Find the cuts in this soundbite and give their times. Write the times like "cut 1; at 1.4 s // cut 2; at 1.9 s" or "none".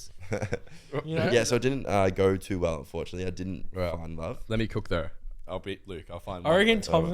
cut 1; at 1.3 s // cut 2; at 5.4 s